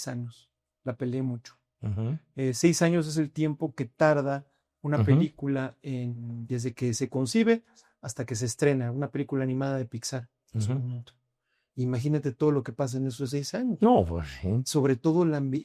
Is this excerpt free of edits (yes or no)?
yes